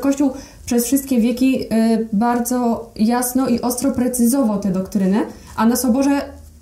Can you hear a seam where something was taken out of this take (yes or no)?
no